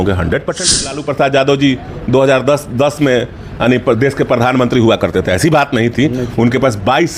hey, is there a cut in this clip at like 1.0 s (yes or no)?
yes